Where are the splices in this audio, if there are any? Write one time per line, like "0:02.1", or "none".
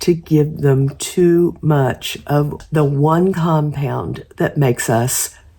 0:02.6